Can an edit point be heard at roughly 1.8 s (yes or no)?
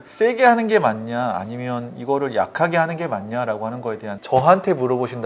no